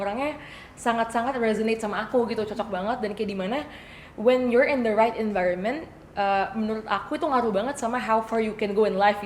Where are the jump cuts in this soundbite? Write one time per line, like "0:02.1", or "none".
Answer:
none